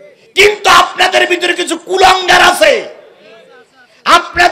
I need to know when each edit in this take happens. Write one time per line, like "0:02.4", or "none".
none